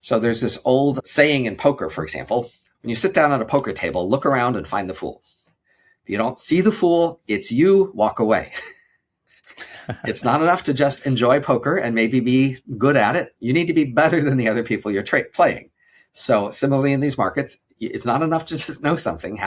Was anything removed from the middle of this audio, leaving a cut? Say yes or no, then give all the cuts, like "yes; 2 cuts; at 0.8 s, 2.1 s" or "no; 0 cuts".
yes; 2 cuts; at 1.0 s, 2.6 s